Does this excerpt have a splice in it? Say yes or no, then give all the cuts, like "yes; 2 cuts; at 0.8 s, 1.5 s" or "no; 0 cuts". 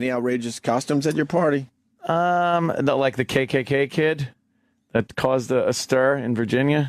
no; 0 cuts